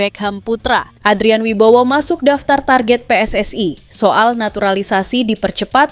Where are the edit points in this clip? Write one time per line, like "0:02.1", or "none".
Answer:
0:00.9